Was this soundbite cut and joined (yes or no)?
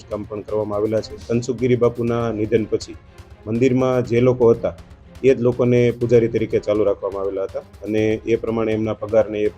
yes